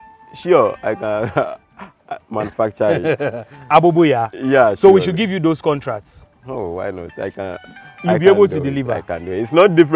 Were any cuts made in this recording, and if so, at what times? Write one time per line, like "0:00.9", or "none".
none